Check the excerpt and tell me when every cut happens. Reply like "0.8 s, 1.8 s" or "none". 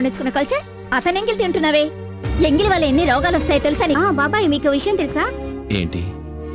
4.0 s